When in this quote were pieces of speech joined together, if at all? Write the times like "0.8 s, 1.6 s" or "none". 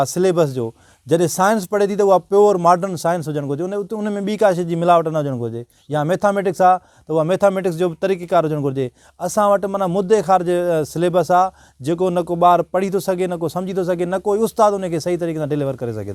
none